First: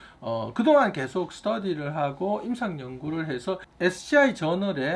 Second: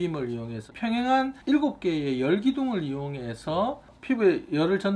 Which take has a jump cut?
first; 1 cut; at 3.6 s

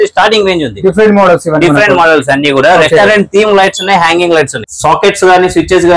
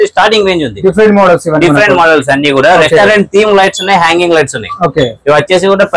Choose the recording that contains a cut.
first; 1 cut; at 4.6 s

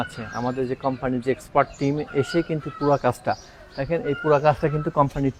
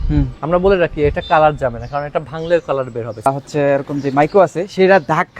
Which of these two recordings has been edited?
second; 1 cut; at 3.3 s

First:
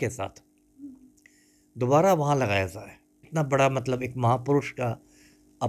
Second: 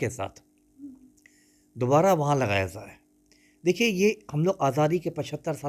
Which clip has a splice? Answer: first; 1 cut; at 3.2 s

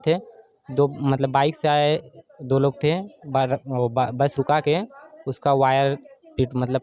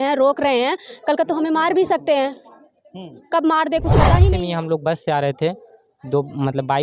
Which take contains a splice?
second; 1 cut; at 4.2 s

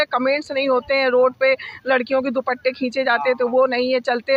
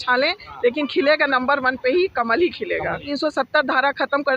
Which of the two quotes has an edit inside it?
second; 1 cut; at 3.1 s

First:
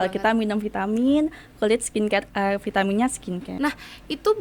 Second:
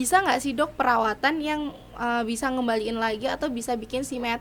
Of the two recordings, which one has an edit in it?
first; 1 cut; at 3.5 s

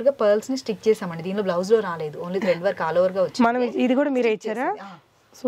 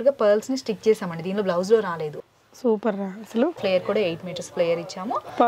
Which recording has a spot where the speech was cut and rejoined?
second; 2 cuts; at 2.1 s, 3.6 s

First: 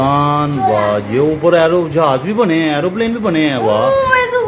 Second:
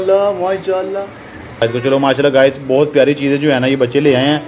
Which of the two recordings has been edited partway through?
second; 1 cut; at 1.6 s

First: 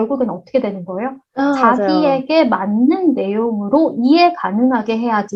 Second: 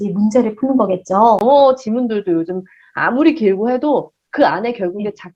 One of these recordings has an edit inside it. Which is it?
second; 1 cut; at 1.4 s

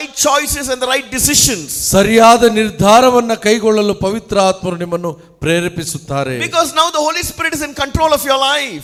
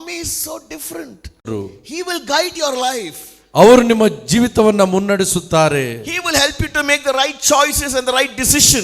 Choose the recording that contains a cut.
second; 1 cut; at 1.5 s

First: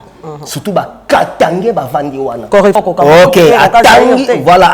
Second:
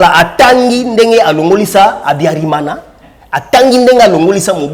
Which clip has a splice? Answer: first; 1 cut; at 2.8 s

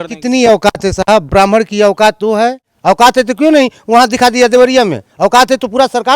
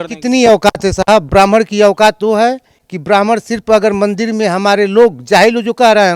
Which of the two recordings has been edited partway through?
first; 1 cut; at 2.7 s

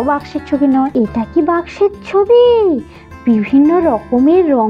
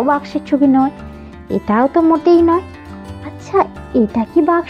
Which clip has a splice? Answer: first; 1 cut; at 0.9 s

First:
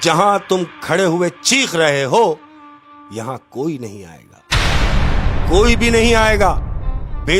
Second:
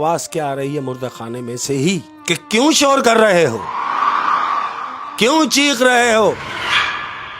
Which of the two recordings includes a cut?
second; 1 cut; at 2.1 s

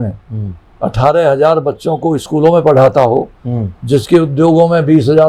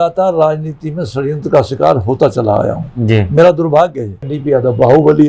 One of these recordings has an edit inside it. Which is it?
second; 1 cut; at 4.3 s

